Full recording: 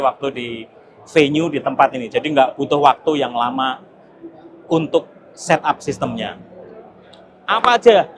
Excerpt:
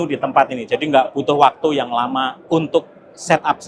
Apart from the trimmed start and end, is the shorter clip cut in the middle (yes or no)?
yes